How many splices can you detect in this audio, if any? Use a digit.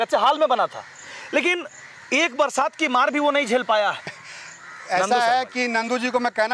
1